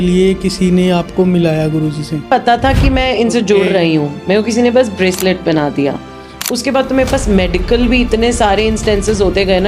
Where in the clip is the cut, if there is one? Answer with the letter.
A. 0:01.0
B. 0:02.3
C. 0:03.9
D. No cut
B